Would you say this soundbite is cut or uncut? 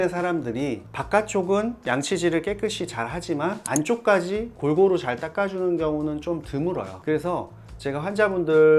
uncut